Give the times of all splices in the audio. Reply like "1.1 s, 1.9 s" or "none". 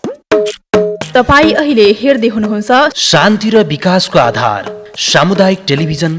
1.0 s